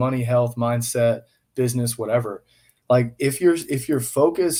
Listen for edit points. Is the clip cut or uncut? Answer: uncut